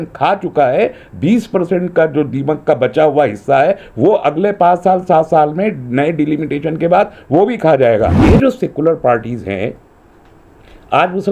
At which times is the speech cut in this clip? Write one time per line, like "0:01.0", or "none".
0:08.2